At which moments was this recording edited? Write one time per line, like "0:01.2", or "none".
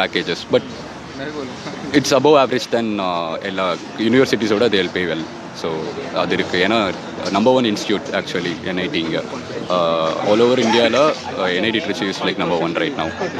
none